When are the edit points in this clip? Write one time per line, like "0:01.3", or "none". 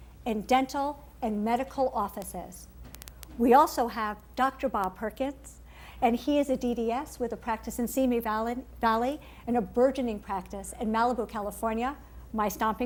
none